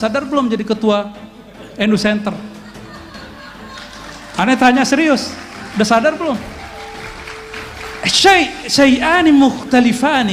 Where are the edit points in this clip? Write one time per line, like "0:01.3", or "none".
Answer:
none